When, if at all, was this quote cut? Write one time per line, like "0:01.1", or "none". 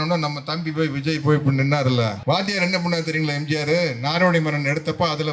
0:02.2